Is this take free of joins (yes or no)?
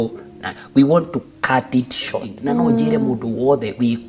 no